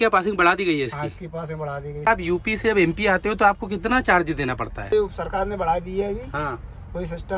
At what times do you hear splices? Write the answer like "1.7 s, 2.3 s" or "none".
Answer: 2.1 s, 4.9 s